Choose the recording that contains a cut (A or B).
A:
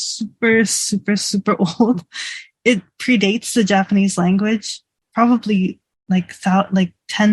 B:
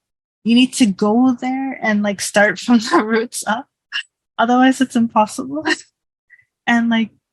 A